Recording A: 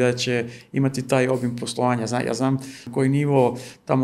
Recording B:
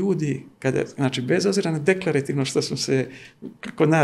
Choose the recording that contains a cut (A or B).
A